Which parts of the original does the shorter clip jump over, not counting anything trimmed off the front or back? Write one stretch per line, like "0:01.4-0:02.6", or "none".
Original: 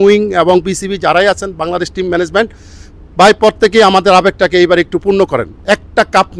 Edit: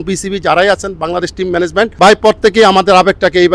0:02.5-0:03.1